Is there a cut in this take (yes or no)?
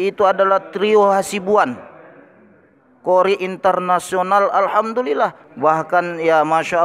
yes